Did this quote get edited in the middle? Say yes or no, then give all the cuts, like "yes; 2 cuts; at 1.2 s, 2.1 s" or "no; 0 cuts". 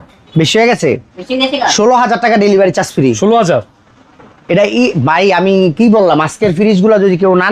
no; 0 cuts